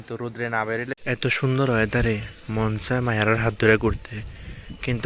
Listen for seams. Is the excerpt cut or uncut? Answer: cut